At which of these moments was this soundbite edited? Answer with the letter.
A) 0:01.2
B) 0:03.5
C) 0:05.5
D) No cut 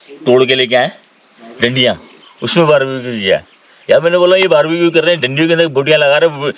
D